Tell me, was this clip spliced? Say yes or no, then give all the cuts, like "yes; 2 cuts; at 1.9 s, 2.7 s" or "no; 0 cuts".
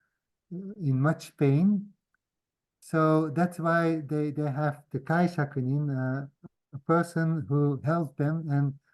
no; 0 cuts